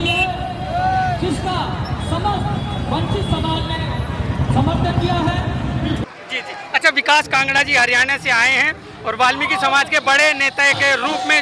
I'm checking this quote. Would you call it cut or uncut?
cut